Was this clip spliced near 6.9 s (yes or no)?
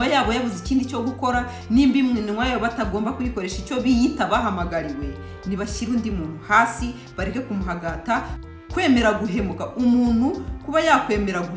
no